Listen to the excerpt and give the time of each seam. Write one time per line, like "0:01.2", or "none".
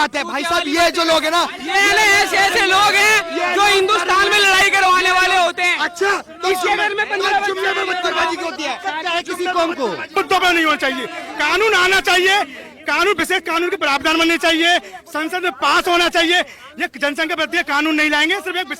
0:10.1